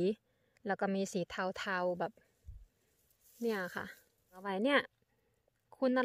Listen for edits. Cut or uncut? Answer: cut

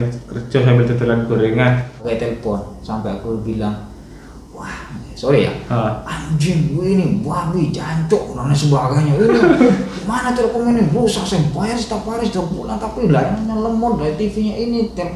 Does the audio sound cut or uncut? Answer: cut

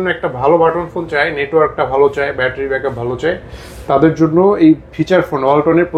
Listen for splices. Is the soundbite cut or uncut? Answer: uncut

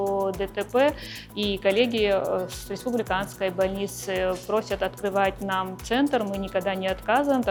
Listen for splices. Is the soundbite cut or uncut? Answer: uncut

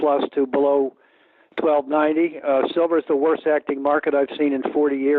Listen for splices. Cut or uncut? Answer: cut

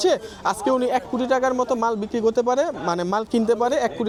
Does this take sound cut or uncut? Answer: uncut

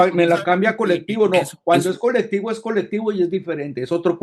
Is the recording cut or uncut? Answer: uncut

